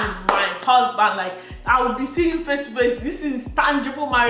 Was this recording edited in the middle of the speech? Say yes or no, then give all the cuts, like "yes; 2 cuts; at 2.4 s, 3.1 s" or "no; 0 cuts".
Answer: no; 0 cuts